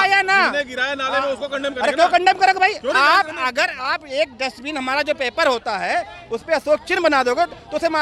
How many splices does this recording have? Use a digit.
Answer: 0